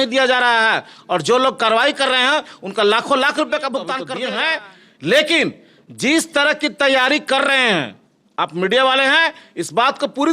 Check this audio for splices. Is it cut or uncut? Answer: cut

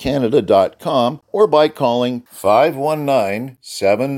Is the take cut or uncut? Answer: cut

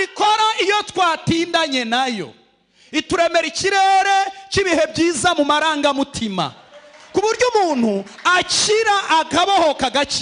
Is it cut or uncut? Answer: uncut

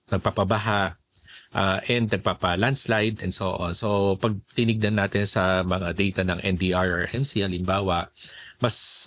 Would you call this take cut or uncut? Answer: uncut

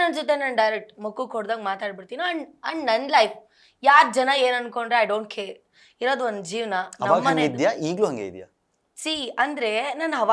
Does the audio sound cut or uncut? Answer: uncut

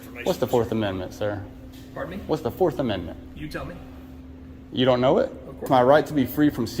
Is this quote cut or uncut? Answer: cut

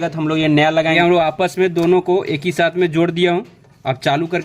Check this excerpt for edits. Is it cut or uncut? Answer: cut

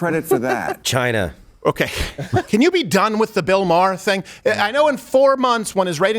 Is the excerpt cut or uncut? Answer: cut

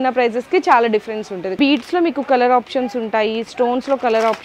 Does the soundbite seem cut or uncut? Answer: cut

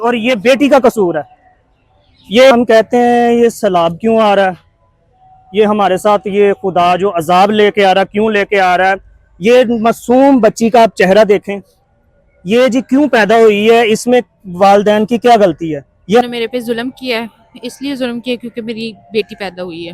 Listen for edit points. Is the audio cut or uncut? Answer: cut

